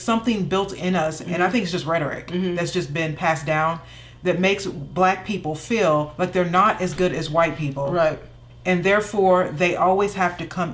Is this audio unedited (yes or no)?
yes